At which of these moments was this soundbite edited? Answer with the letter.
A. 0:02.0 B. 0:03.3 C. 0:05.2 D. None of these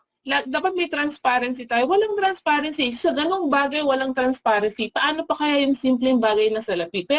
D